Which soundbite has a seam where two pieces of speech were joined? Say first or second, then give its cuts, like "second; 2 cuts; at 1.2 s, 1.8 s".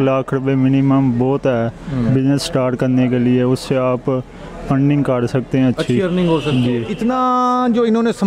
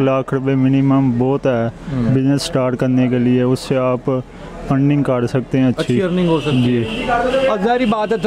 first; 1 cut; at 6.9 s